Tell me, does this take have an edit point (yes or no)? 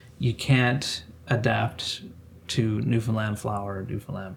no